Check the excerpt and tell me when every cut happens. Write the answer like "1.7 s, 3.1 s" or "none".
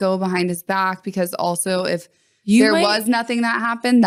none